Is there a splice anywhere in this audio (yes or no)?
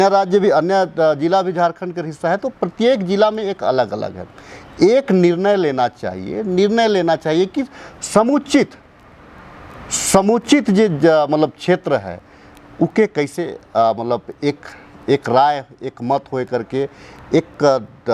no